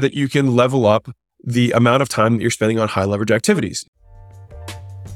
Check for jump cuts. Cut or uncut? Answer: cut